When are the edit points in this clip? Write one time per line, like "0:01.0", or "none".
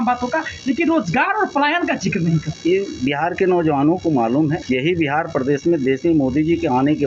0:02.5
0:04.6